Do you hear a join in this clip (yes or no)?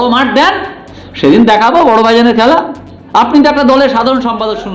no